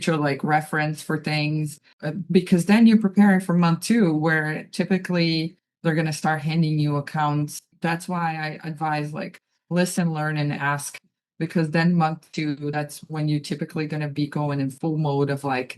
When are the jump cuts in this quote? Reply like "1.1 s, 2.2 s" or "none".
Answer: 1.8 s, 7.7 s